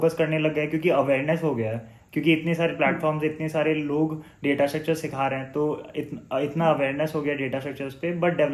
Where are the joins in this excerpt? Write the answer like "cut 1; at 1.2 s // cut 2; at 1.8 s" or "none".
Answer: none